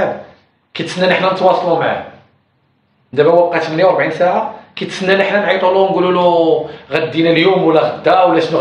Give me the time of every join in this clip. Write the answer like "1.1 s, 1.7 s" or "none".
none